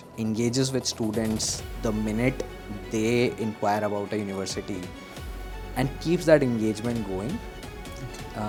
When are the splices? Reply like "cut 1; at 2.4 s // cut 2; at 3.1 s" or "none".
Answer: none